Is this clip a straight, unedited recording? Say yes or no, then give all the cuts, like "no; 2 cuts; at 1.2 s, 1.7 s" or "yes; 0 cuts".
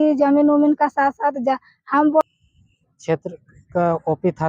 no; 1 cut; at 2.2 s